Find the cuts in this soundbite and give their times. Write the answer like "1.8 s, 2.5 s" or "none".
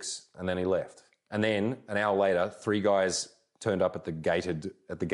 none